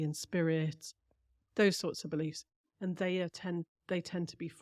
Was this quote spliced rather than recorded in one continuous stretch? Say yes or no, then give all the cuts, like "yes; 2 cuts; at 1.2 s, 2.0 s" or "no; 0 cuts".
no; 0 cuts